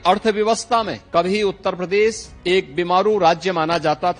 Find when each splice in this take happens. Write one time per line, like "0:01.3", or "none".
0:01.0
0:02.3